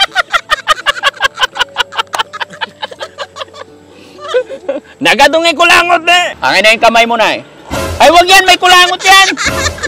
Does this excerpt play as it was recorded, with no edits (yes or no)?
no